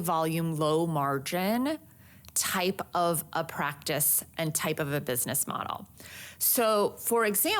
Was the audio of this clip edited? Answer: no; 0 cuts

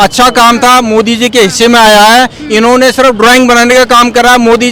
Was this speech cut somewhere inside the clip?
no; 0 cuts

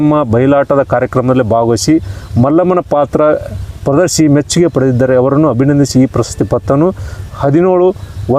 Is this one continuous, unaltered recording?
yes; 0 cuts

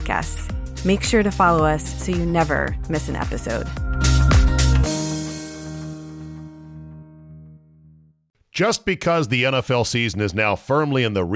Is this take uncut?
no; 1 cut; at 8.2 s

